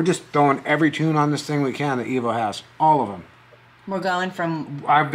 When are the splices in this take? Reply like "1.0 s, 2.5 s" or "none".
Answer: none